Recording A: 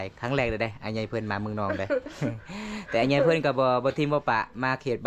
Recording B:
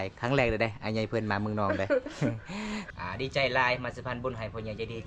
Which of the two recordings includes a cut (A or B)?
B